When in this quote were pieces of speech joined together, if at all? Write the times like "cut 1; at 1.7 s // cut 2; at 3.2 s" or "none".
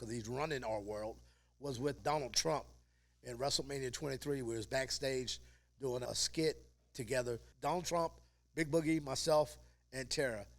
cut 1; at 2.0 s // cut 2; at 6.0 s // cut 3; at 7.5 s